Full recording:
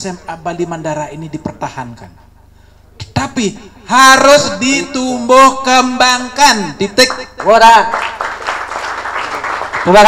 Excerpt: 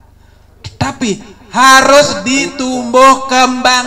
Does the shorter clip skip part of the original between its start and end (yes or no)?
no